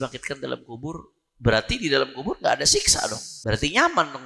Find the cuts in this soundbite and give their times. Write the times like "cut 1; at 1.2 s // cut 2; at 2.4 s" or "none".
cut 1; at 3.3 s